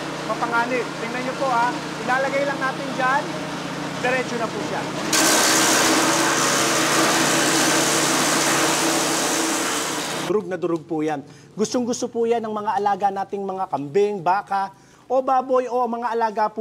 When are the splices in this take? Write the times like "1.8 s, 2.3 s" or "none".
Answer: 10.2 s